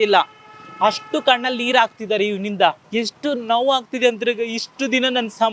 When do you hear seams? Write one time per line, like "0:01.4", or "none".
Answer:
0:02.8

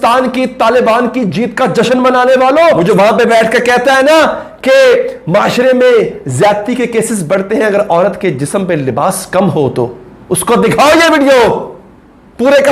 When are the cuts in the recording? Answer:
0:02.8

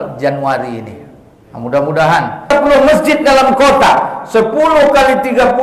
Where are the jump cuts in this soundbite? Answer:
0:02.5

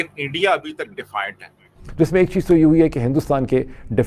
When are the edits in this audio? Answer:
0:01.8

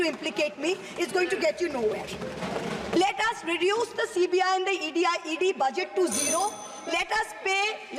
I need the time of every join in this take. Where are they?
none

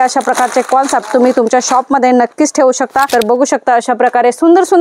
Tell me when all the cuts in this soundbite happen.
0:03.1

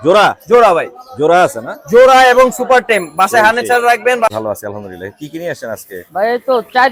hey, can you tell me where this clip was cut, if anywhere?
0:04.3

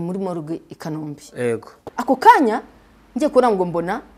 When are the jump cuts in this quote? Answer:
0:01.8

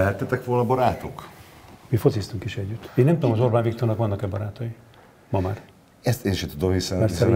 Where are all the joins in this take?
0:02.7

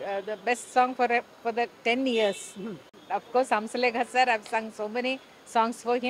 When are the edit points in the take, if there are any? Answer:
0:03.0

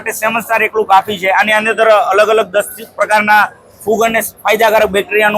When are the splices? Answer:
none

